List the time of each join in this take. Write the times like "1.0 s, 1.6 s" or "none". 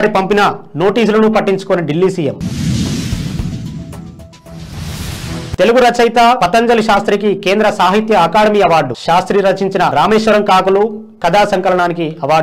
none

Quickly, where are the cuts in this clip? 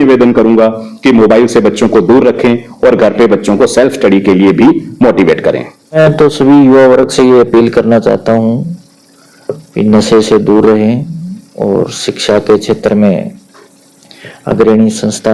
6.0 s

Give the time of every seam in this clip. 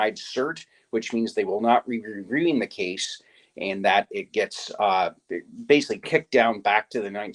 none

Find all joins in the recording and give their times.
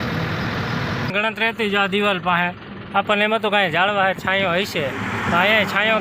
1.1 s

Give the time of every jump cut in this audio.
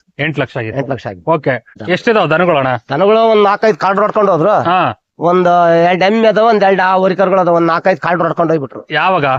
1.7 s

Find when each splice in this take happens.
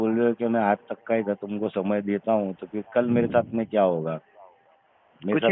none

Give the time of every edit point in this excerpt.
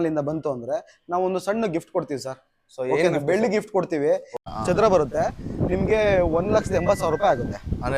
4.3 s

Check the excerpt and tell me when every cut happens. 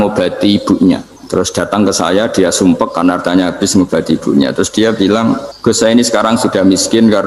1.1 s, 5.5 s

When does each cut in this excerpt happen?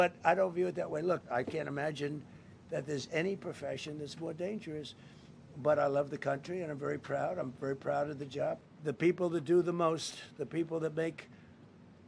1.2 s, 8.7 s

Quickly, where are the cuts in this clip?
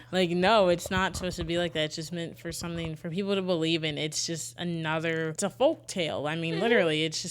5.3 s

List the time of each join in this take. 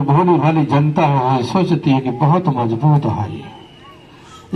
none

